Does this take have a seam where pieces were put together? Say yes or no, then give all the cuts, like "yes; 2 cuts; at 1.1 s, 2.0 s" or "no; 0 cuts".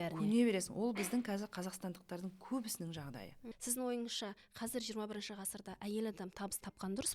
yes; 1 cut; at 3.4 s